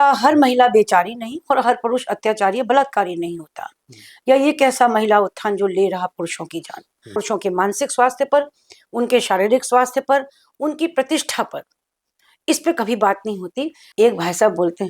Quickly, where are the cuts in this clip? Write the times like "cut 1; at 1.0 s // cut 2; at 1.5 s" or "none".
cut 1; at 7.2 s // cut 2; at 13.8 s